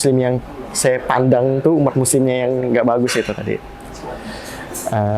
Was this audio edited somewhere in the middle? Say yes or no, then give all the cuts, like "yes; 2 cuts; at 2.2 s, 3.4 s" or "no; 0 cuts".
no; 0 cuts